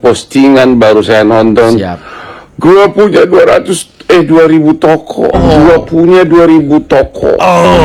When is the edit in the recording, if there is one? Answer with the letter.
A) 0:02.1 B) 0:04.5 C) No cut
C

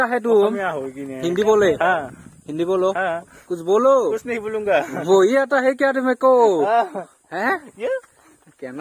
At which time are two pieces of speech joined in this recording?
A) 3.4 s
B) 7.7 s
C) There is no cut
C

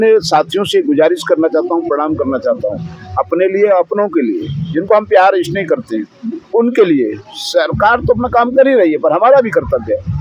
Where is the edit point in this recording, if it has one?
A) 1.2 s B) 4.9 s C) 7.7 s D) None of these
D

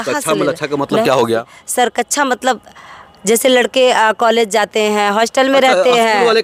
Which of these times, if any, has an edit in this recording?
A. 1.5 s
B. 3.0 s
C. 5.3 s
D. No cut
D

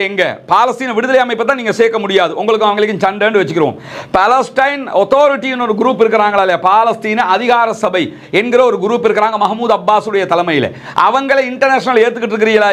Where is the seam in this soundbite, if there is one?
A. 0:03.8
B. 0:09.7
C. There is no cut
C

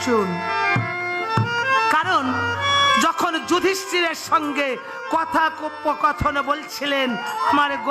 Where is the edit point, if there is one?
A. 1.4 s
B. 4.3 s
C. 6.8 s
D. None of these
D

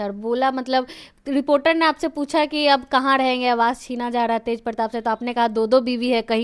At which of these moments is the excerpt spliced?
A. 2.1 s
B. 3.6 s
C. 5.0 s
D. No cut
D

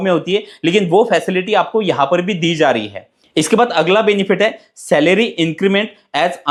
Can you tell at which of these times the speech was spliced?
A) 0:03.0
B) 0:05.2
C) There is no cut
C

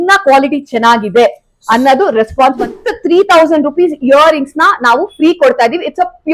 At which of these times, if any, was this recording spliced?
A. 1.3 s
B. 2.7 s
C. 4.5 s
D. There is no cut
B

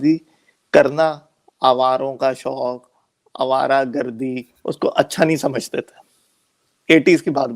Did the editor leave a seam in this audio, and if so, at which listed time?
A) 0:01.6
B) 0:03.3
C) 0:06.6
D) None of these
D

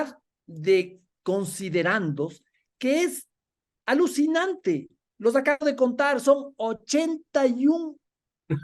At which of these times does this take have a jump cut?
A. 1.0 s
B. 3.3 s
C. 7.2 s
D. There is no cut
A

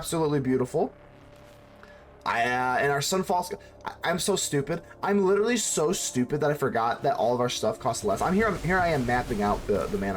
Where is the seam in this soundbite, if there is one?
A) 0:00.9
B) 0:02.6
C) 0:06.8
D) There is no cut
D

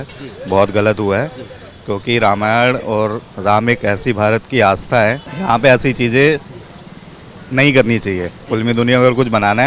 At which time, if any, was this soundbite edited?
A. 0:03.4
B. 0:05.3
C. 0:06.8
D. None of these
B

